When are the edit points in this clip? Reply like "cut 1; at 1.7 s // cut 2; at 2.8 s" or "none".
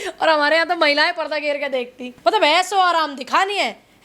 cut 1; at 2.1 s